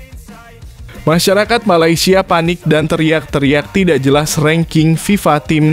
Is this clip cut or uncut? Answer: cut